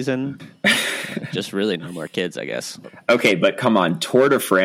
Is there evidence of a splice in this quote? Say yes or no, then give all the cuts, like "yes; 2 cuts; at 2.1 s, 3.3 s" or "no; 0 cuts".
yes; 2 cuts; at 0.8 s, 2.9 s